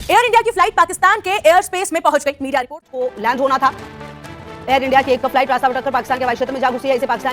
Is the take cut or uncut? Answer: cut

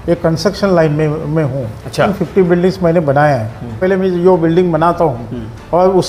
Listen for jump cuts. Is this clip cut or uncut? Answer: cut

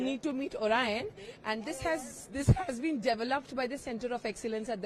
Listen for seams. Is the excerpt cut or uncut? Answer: uncut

